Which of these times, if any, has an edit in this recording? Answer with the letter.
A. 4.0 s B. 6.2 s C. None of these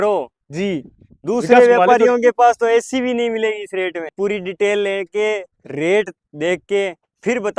A